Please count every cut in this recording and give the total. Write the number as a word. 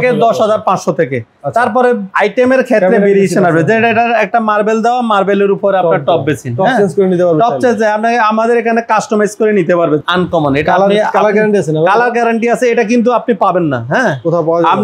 two